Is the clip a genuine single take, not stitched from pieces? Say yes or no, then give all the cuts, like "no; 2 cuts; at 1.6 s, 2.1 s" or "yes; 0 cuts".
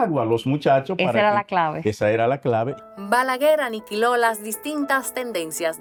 yes; 0 cuts